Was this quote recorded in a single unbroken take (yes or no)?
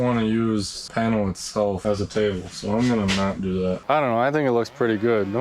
no